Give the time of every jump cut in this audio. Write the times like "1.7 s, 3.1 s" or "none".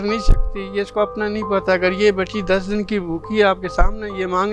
none